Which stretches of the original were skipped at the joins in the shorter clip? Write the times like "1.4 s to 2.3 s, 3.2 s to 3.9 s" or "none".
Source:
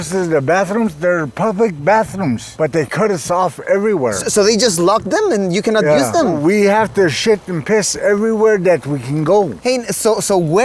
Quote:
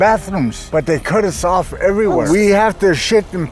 4.1 s to 6.4 s